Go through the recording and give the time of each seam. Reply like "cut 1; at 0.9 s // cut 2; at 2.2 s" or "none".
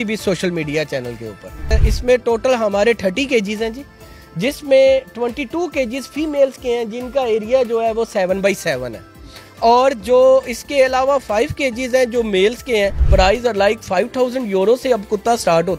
cut 1; at 1.7 s // cut 2; at 13.0 s